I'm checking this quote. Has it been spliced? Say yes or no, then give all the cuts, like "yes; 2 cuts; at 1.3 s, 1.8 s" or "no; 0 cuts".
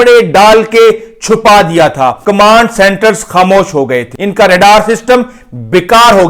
yes; 2 cuts; at 2.2 s, 4.2 s